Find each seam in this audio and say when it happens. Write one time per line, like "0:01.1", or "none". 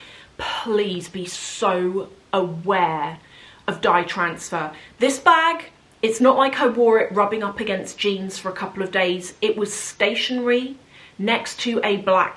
none